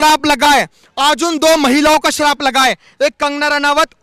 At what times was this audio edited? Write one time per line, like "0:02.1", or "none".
none